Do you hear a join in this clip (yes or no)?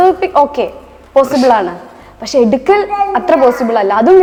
no